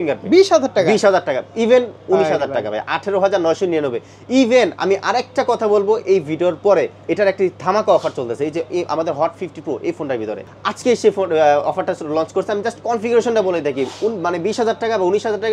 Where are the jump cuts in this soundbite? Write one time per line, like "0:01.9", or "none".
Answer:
none

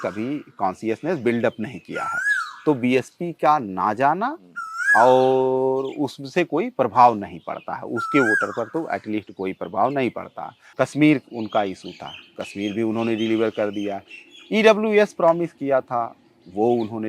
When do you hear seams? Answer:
0:10.6

